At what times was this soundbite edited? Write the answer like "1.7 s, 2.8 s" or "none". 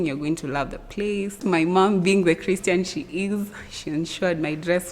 1.4 s